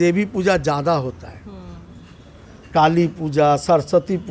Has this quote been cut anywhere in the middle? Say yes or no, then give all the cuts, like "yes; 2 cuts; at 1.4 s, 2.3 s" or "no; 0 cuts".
no; 0 cuts